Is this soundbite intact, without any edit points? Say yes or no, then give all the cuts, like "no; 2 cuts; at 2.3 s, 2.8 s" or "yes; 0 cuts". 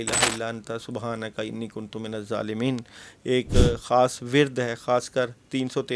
yes; 0 cuts